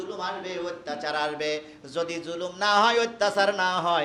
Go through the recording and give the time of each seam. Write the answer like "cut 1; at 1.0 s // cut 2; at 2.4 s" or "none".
none